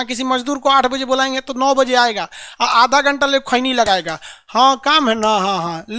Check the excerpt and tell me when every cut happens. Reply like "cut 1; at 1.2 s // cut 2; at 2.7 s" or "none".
none